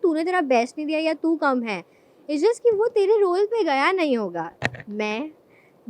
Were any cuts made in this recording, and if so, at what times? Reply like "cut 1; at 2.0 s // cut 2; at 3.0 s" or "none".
cut 1; at 4.5 s